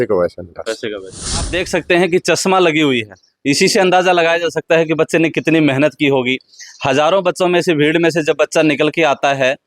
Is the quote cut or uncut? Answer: cut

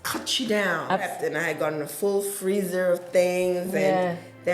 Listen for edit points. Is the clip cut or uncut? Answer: cut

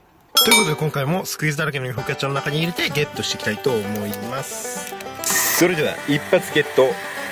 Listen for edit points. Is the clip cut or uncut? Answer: cut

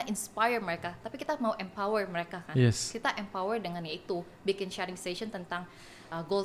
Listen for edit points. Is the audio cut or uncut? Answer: uncut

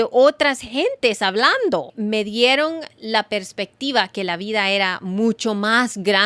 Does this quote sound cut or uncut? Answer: uncut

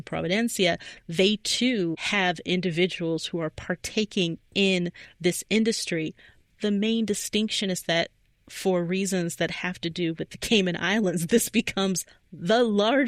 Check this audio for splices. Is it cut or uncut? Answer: uncut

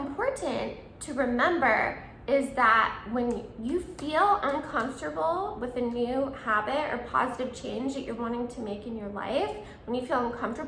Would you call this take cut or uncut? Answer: uncut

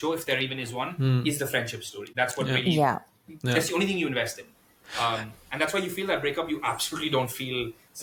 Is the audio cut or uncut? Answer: uncut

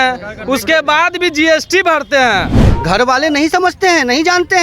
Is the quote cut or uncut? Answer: cut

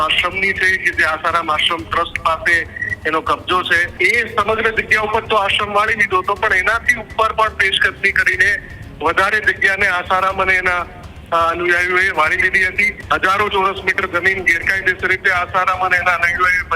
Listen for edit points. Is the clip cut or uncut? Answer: cut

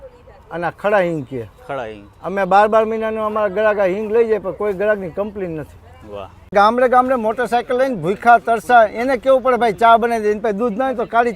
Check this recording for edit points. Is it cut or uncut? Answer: cut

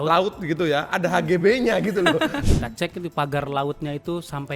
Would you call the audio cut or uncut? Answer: cut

